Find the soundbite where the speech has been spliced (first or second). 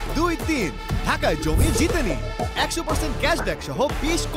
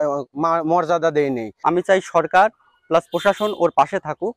second